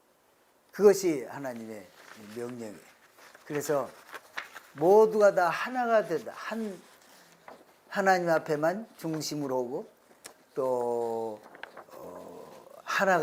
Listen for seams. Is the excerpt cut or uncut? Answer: uncut